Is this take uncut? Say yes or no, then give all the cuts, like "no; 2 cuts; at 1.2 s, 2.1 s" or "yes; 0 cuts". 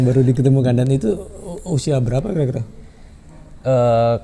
yes; 0 cuts